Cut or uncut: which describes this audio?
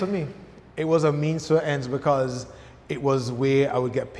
uncut